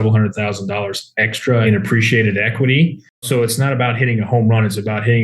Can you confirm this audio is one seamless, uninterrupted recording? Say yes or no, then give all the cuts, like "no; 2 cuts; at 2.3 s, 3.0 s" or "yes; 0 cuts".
no; 2 cuts; at 1.6 s, 3.2 s